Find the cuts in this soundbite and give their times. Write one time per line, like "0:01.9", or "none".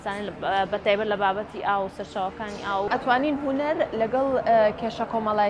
0:02.9